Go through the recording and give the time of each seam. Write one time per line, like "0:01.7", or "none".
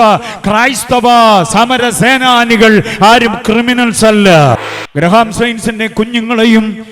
0:04.7